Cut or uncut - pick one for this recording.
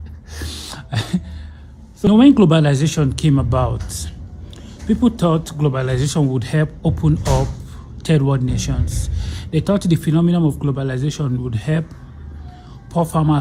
cut